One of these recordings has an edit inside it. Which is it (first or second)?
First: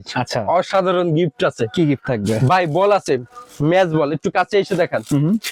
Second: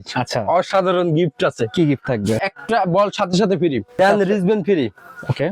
second